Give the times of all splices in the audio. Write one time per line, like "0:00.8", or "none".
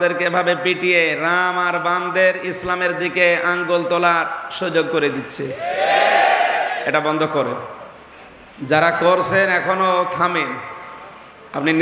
none